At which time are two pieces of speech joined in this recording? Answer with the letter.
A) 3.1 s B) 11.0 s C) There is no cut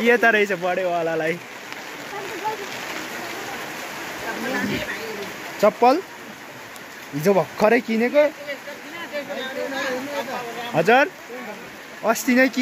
A